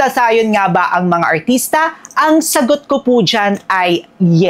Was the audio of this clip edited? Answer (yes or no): no